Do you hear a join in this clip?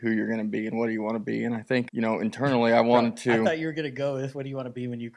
yes; 1 cut; at 1.9 s

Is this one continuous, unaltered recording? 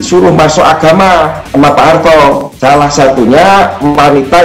no; 2 cuts; at 1.4 s, 2.5 s

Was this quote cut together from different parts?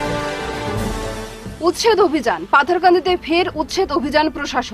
yes; 1 cut; at 1.0 s

